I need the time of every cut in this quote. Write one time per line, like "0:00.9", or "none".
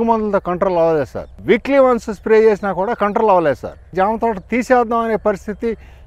0:01.2
0:03.8